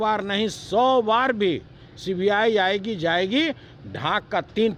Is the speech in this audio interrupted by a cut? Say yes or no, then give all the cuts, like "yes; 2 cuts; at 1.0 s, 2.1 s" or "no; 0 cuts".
no; 0 cuts